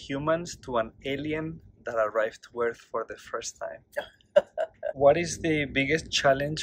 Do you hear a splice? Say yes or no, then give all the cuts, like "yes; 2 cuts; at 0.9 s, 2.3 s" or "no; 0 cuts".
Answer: yes; 1 cut; at 5.0 s